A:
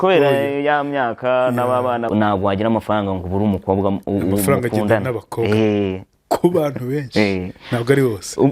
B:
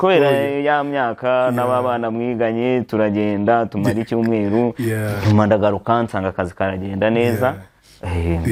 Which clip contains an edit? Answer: A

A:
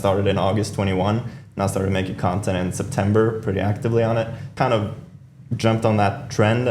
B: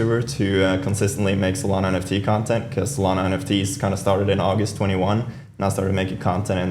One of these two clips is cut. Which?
A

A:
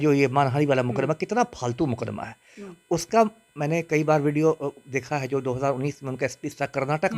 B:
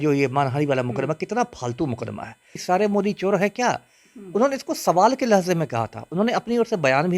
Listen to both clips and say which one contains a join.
B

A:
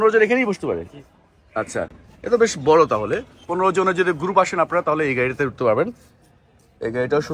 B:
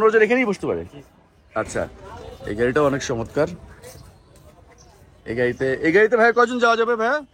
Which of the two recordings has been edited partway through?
B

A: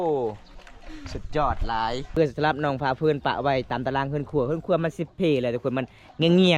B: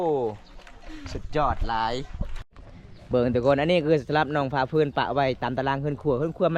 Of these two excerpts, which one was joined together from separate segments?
A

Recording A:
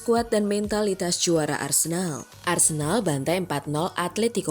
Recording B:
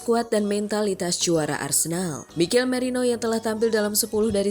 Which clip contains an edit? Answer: A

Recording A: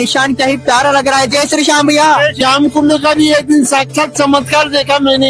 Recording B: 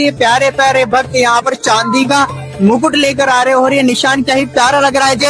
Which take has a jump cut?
A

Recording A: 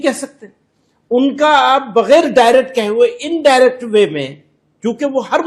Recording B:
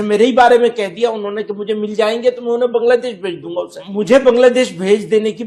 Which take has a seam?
B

